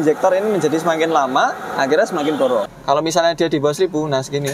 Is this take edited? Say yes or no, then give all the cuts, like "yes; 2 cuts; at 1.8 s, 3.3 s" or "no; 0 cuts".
yes; 1 cut; at 2.7 s